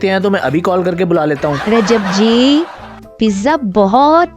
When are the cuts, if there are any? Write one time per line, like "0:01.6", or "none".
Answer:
0:01.6